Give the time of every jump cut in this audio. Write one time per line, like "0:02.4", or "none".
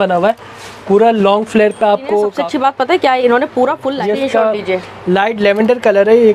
0:02.4
0:03.9